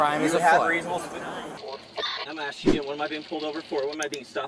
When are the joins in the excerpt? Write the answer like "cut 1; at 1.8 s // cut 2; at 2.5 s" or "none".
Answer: cut 1; at 1.6 s